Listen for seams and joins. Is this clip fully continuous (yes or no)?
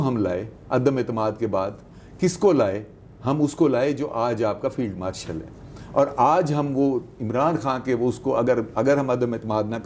yes